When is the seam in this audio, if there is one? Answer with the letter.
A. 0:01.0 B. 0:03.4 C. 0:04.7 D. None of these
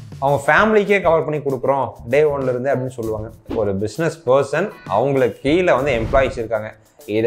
B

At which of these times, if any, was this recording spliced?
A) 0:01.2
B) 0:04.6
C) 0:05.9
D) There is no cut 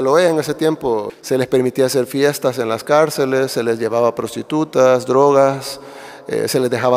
A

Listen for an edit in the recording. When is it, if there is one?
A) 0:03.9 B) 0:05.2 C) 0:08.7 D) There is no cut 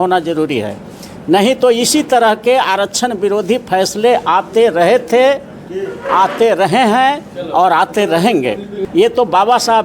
C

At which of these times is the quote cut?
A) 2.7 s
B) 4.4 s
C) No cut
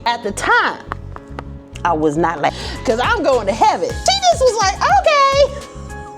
A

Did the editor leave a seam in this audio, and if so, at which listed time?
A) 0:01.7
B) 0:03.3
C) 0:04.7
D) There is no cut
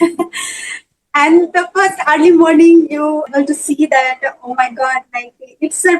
B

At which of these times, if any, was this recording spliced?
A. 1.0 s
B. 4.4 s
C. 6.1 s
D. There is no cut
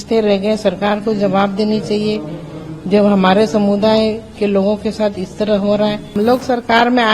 C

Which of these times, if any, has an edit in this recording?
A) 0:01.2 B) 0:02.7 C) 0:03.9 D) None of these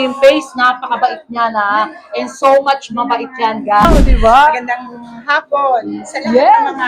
C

